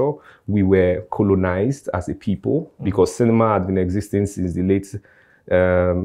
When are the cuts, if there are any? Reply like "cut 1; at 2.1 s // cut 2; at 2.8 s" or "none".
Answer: none